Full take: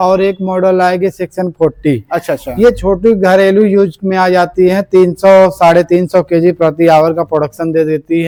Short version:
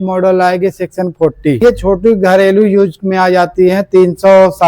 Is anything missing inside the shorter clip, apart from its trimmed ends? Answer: yes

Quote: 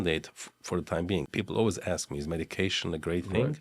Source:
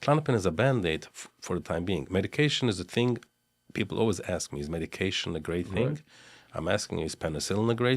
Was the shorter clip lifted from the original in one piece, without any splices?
no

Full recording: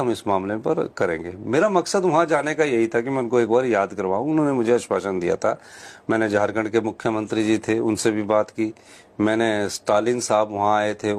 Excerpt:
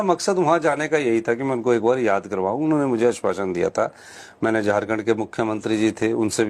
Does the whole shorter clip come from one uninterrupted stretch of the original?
yes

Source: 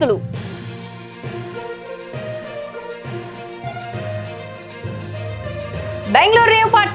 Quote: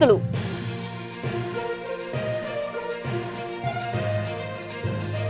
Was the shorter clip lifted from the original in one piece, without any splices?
yes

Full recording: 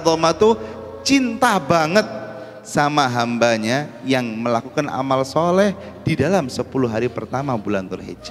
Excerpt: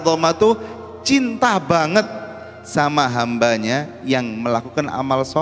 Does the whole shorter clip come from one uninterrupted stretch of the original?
yes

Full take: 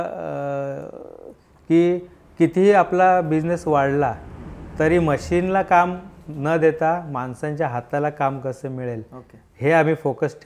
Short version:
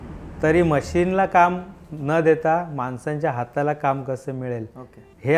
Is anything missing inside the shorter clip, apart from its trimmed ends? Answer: no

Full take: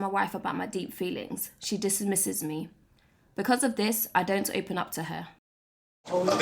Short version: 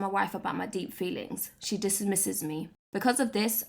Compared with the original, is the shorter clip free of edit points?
no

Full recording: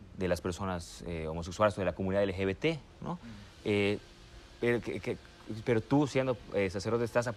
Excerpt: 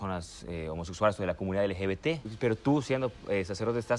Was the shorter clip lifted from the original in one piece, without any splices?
no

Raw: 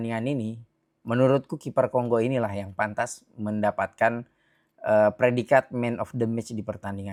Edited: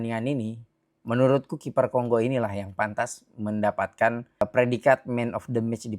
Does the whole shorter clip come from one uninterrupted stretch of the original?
no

